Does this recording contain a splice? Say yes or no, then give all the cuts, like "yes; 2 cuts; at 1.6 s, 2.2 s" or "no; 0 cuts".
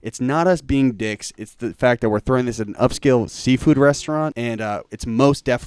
yes; 1 cut; at 4.4 s